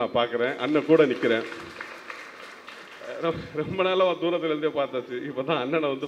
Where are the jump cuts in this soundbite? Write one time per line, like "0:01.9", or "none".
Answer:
none